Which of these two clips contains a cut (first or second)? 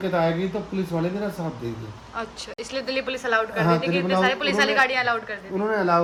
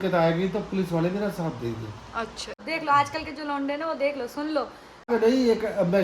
second